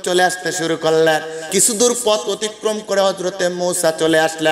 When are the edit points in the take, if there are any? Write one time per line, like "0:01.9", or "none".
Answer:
0:01.4